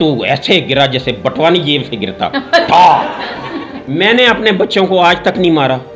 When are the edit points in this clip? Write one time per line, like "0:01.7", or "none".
0:03.8